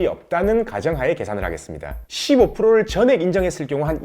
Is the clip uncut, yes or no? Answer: no